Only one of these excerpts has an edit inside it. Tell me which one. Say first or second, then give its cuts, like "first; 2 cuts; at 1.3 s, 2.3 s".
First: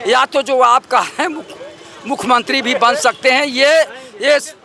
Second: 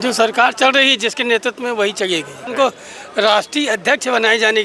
second; 1 cut; at 2.5 s